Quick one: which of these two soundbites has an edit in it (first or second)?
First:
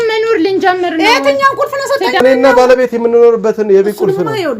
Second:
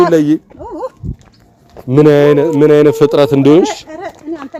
first